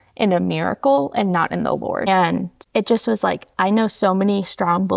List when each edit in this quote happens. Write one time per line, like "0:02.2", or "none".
0:02.0